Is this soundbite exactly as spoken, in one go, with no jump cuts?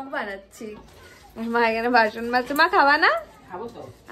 yes; 0 cuts

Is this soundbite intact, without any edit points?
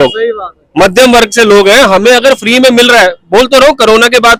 yes; 0 cuts

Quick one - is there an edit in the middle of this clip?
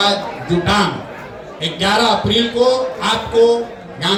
no; 0 cuts

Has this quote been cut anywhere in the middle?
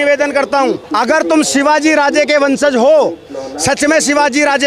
no; 0 cuts

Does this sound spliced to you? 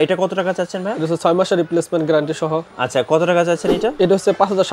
no; 0 cuts

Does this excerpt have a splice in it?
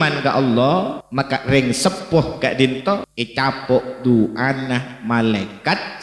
yes; 2 cuts; at 1.0 s, 3.2 s

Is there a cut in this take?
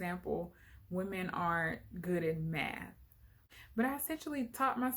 yes; 1 cut; at 3.3 s

